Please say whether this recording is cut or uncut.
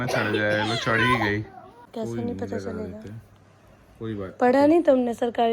cut